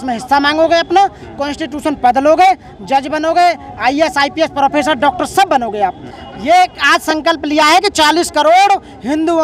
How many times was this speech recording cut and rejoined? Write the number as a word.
one